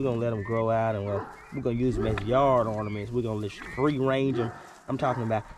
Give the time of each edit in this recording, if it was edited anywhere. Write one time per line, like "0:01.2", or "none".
none